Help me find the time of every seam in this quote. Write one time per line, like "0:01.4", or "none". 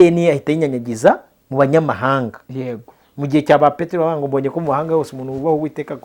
none